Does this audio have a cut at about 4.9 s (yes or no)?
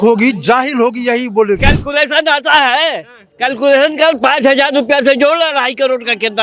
no